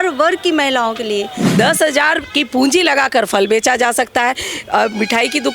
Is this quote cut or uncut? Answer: cut